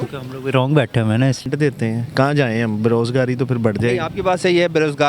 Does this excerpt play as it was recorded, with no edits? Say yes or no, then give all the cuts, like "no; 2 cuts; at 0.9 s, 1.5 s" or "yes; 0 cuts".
no; 1 cut; at 1.4 s